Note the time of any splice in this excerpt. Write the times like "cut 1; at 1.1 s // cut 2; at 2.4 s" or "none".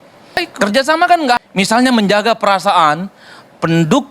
cut 1; at 1.4 s